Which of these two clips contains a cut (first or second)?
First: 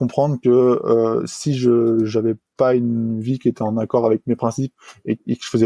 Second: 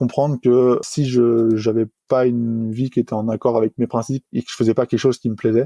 second